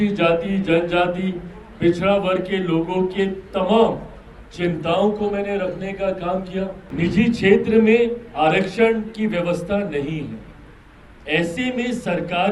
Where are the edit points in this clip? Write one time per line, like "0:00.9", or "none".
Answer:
0:06.8